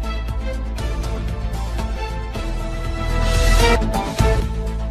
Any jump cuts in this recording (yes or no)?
yes